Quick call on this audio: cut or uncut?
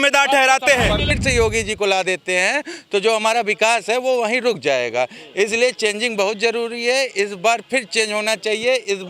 cut